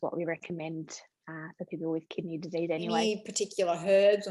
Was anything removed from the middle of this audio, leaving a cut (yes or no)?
yes